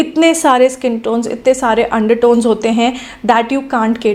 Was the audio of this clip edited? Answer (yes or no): no